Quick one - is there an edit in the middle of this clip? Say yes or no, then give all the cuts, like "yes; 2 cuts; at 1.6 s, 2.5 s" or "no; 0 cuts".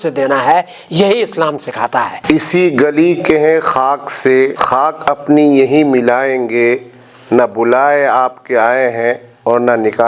yes; 1 cut; at 2.1 s